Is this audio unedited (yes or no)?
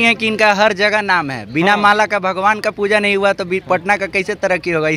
yes